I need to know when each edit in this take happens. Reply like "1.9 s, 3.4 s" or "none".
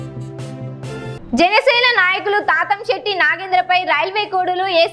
1.1 s